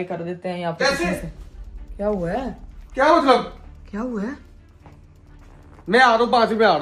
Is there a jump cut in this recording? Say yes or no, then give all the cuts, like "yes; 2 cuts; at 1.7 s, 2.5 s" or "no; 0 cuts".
no; 0 cuts